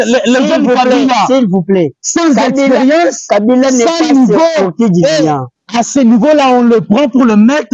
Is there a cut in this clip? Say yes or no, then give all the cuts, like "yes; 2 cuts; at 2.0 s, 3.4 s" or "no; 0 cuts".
yes; 1 cut; at 5.5 s